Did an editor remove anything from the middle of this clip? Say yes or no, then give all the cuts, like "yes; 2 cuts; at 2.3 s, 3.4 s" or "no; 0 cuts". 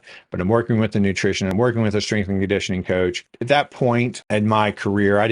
yes; 3 cuts; at 1.6 s, 3.3 s, 4.2 s